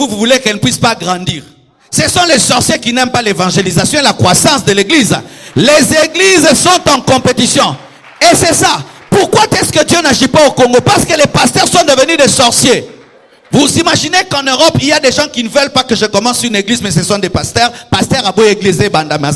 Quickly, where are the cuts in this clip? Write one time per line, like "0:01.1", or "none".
none